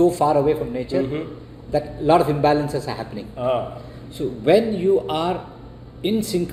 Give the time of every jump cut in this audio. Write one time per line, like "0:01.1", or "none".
none